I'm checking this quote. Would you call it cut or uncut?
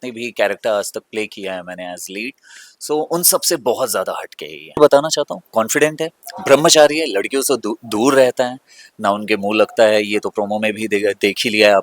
cut